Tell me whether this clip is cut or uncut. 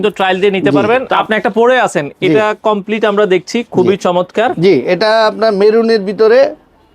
cut